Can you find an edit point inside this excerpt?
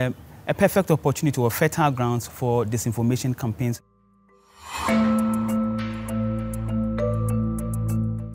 yes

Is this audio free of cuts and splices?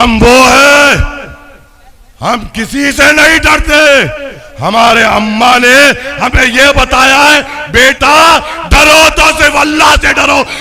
yes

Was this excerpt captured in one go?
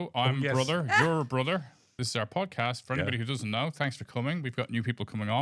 no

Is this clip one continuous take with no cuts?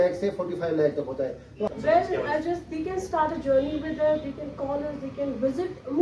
no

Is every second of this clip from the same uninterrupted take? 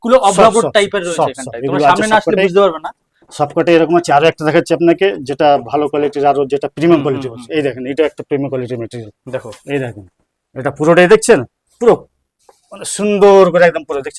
yes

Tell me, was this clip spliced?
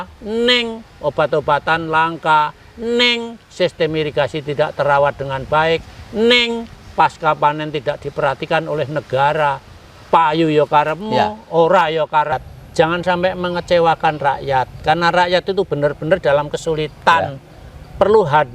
yes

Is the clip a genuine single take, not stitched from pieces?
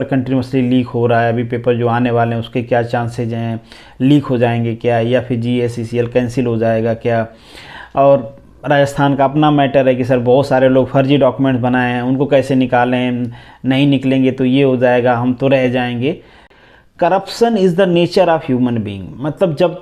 no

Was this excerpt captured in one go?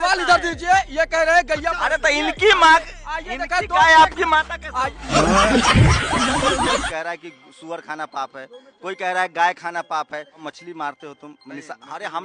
no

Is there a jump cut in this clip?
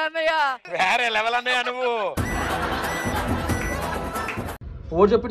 no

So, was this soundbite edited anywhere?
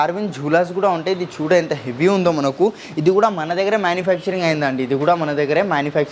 no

